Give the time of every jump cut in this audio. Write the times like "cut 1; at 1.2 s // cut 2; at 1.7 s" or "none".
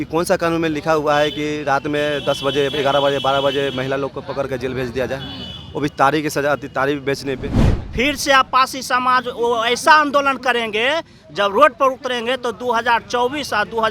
cut 1; at 7.8 s